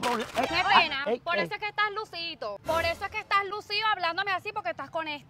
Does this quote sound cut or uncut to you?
uncut